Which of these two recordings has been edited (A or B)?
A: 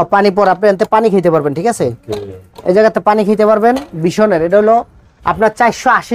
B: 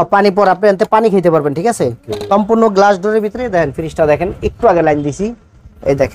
B